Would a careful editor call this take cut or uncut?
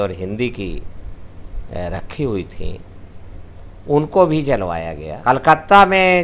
cut